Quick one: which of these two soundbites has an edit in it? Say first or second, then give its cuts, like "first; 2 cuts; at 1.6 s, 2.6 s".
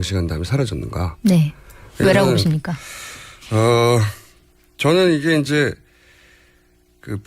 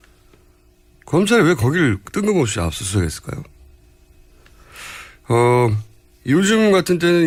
first; 1 cut; at 1.5 s